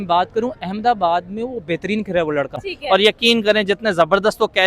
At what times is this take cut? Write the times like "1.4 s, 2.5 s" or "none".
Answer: 2.7 s